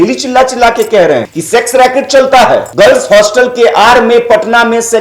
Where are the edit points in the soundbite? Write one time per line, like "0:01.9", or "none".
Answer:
0:01.3
0:02.7